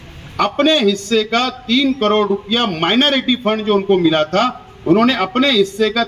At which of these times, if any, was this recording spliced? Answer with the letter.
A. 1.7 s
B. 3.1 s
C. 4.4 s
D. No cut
D